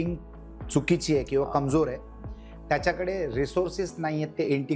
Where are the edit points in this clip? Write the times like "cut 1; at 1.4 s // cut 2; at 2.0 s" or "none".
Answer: none